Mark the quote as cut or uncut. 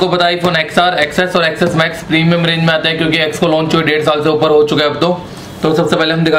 uncut